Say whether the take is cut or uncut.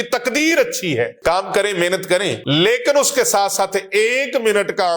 cut